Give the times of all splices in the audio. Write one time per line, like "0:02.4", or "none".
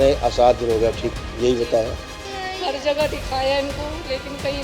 0:01.1
0:02.1